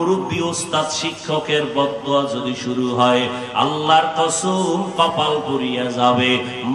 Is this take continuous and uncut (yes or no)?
yes